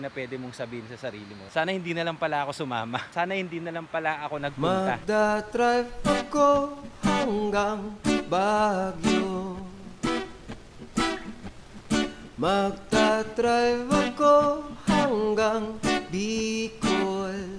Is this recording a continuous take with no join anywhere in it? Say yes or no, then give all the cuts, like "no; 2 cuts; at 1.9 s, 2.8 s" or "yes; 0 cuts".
no; 3 cuts; at 1.5 s, 3.1 s, 4.5 s